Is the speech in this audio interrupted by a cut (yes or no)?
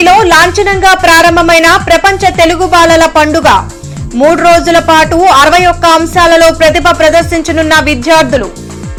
no